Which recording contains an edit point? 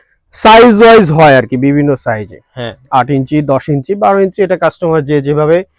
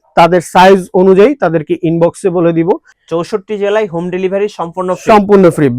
second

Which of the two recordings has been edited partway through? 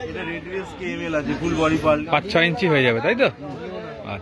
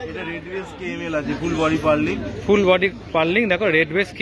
first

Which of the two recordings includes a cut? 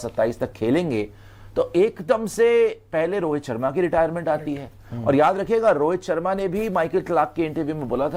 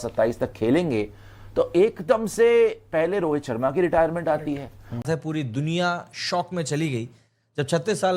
second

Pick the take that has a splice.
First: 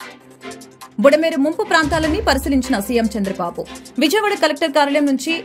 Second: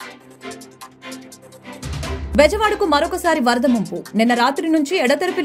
first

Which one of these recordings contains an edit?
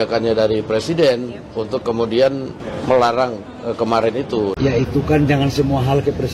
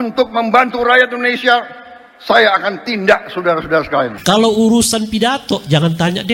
second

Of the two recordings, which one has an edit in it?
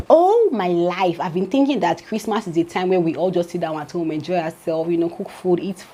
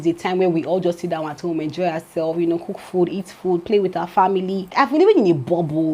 second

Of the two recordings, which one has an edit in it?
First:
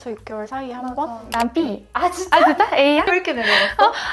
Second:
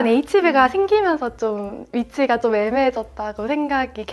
first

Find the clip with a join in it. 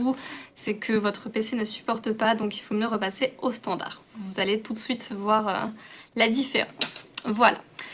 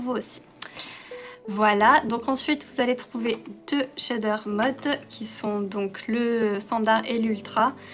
first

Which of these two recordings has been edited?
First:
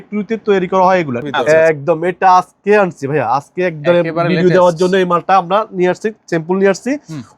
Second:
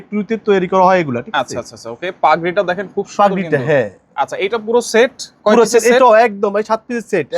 first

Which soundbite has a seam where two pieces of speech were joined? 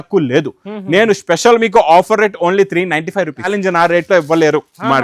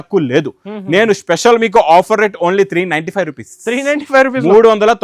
first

